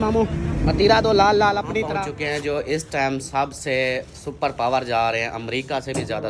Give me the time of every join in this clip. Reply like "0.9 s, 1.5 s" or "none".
1.9 s